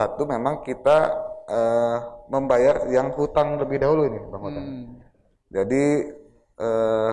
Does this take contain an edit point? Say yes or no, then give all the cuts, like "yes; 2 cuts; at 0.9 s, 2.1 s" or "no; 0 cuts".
no; 0 cuts